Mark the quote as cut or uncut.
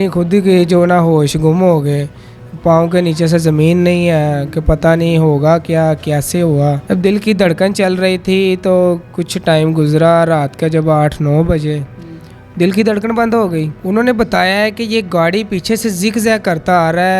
cut